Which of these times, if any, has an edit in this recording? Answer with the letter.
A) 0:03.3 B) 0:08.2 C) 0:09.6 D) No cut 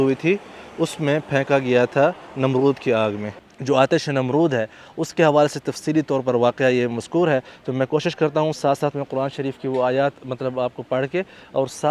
A